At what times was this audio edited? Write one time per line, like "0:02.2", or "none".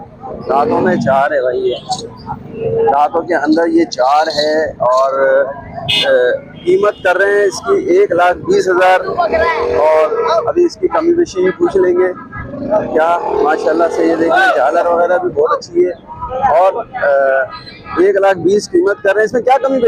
none